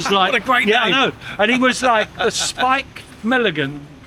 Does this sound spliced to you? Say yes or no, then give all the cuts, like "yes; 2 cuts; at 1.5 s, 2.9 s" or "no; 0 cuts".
no; 0 cuts